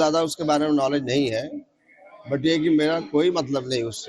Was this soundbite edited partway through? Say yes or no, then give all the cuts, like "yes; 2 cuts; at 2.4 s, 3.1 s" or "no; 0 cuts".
yes; 1 cut; at 1.0 s